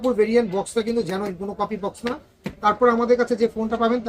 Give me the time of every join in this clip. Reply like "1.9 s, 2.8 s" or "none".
none